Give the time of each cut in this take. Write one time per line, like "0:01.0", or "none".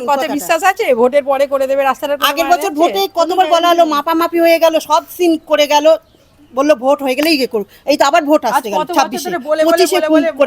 none

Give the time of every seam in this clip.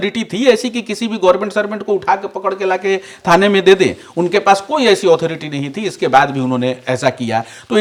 none

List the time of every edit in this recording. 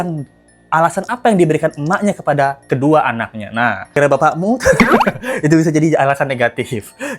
0:04.0

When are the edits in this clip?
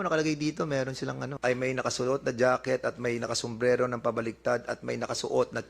0:01.3

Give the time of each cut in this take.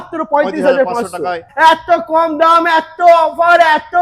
0:01.4

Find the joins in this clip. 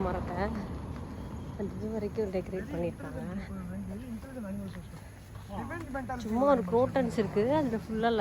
none

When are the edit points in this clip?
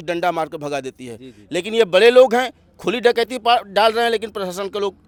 none

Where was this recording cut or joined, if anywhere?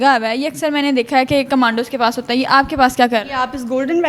none

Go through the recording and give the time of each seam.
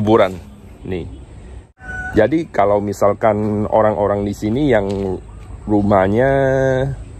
0:01.3

